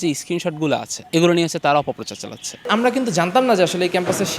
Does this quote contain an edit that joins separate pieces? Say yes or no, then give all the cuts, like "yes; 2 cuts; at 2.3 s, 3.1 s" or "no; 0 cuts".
yes; 2 cuts; at 0.9 s, 2.7 s